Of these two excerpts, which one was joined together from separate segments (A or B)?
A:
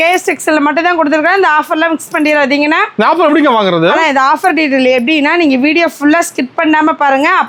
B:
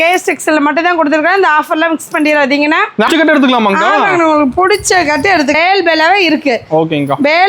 B